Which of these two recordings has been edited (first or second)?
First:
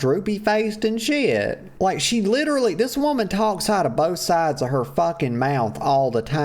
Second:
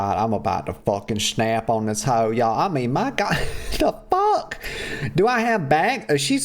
first